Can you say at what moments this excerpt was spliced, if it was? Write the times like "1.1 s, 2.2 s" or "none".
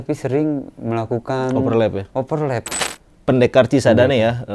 2.7 s